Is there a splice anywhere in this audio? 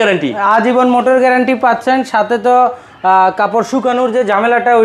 no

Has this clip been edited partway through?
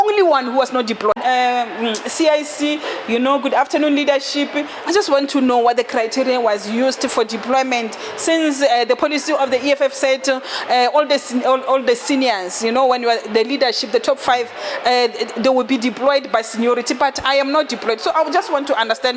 yes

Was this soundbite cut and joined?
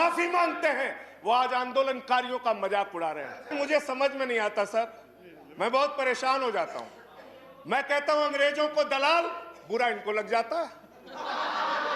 yes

